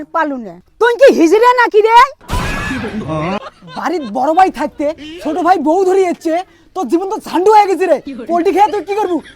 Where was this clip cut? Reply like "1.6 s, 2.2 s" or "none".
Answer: 3.4 s